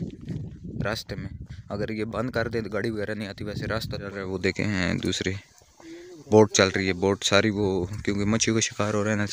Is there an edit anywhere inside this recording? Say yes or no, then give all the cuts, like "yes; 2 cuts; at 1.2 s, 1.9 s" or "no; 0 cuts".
yes; 1 cut; at 4.3 s